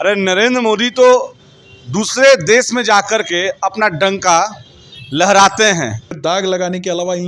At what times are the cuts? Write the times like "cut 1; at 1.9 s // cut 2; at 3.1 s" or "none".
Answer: cut 1; at 6.1 s